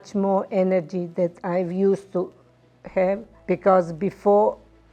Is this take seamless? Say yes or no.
no